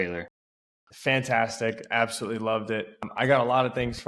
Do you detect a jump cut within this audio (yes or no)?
yes